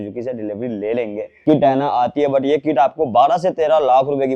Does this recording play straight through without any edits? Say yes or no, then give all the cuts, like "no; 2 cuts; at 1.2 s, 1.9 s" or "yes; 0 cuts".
no; 1 cut; at 1.4 s